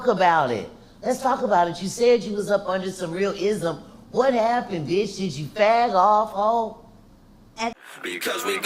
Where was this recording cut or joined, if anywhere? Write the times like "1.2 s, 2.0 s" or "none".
7.7 s

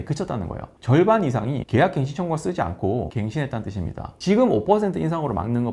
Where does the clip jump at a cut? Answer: 1.6 s, 3.1 s, 4.1 s

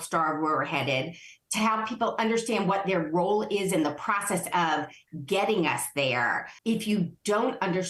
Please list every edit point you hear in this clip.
6.5 s

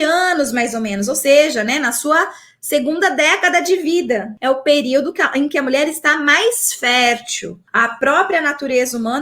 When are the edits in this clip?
4.3 s, 7.6 s

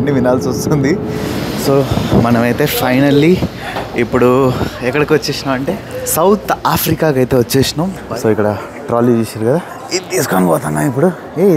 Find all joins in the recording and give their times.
1.3 s, 5.9 s, 8.0 s, 9.8 s

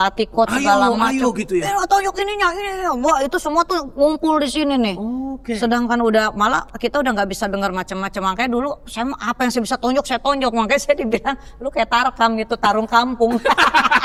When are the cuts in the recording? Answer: none

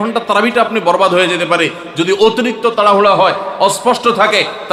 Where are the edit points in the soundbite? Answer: none

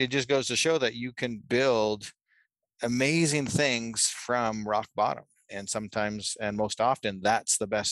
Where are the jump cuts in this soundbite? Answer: none

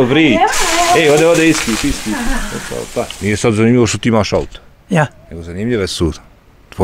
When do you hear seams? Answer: 3.1 s

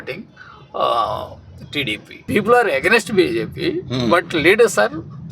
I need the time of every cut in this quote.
2.2 s

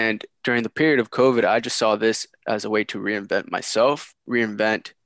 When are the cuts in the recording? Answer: 4.1 s

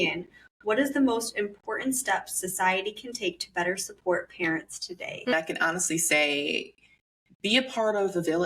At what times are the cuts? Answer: 5.3 s

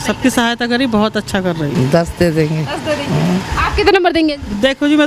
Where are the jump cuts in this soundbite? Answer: 1.7 s

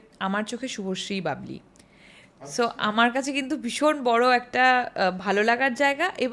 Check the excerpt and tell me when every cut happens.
none

